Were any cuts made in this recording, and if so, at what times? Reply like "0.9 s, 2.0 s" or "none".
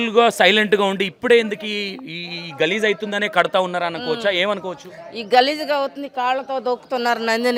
none